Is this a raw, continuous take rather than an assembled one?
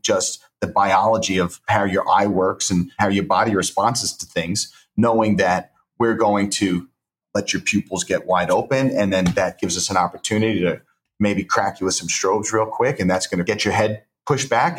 no; 4 cuts; at 1.6 s, 2.9 s, 7.2 s, 13.4 s

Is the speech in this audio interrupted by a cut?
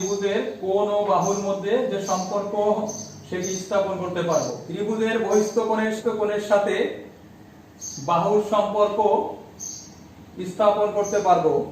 yes; 2 cuts; at 4.6 s, 6.0 s

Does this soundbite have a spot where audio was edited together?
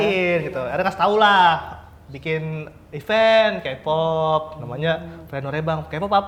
no; 0 cuts

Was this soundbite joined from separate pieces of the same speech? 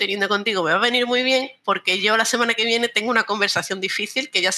no; 0 cuts

